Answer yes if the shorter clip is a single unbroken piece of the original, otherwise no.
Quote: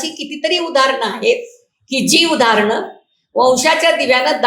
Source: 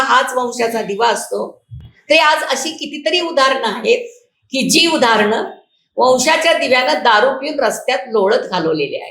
yes